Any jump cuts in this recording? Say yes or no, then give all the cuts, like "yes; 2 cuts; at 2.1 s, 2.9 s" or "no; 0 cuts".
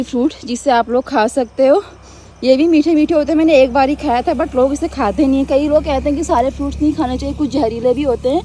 no; 0 cuts